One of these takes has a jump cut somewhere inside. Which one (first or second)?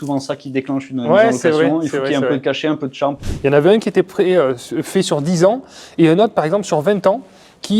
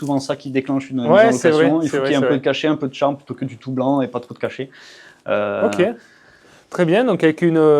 first